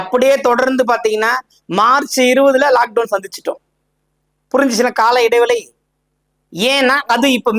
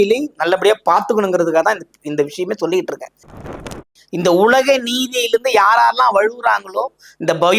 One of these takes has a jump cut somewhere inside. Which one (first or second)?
second